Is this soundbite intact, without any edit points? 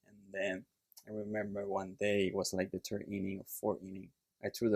yes; 0 cuts

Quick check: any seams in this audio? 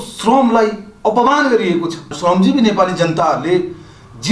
yes; 1 cut; at 2.1 s

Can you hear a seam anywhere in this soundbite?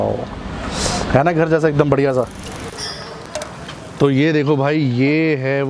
yes; 1 cut; at 2.8 s

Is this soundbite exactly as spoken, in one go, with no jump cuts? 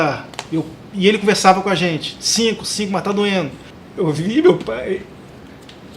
no; 1 cut; at 3.7 s

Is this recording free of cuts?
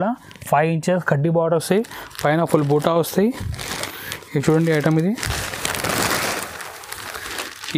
yes; 0 cuts

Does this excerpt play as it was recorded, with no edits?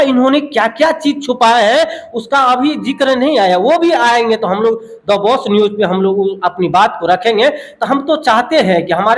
yes; 0 cuts

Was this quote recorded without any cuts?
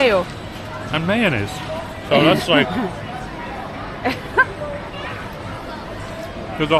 yes; 0 cuts

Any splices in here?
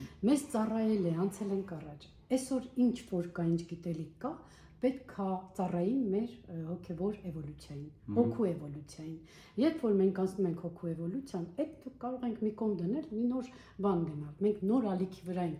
no; 0 cuts

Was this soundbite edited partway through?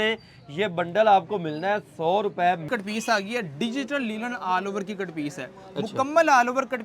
yes; 1 cut; at 2.7 s

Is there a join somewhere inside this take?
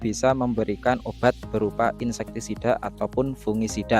no; 0 cuts

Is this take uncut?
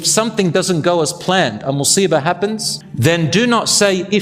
yes; 0 cuts

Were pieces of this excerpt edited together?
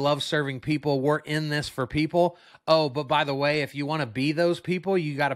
no; 0 cuts

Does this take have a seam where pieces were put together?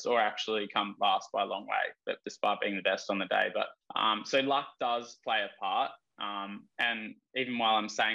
yes; 2 cuts; at 2.3 s, 3.8 s

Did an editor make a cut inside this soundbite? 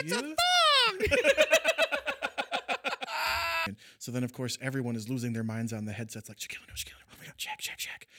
yes; 1 cut; at 3.7 s

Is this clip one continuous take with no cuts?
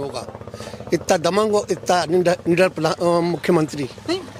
yes; 0 cuts

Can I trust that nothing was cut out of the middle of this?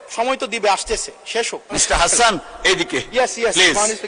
no; 1 cut; at 1.8 s

